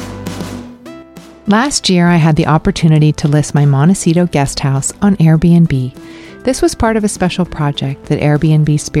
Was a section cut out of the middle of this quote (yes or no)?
no